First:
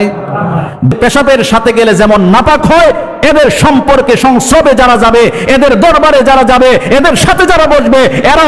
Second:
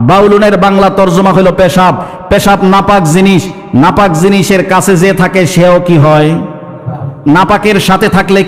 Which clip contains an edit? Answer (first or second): first